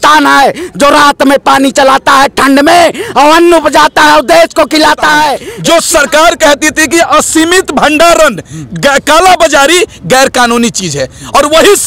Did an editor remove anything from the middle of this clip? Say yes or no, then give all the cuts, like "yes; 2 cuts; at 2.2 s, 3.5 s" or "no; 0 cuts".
yes; 1 cut; at 5.5 s